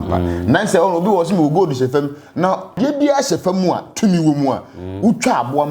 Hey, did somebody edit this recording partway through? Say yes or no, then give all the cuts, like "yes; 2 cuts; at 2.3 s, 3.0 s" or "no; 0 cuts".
yes; 1 cut; at 2.8 s